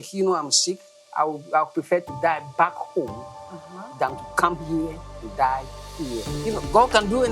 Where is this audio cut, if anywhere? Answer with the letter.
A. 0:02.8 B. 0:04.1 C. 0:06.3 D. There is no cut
C